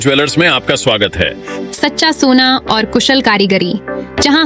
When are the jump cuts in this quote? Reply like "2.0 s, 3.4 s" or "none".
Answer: none